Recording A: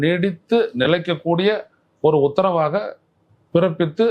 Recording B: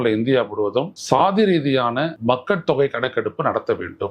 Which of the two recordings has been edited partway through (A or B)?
B